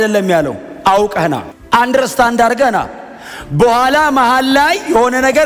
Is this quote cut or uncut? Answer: uncut